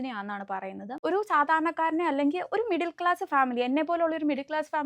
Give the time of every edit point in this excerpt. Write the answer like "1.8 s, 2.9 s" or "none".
0.9 s